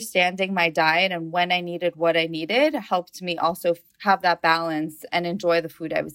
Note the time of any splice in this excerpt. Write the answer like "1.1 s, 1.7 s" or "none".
5.1 s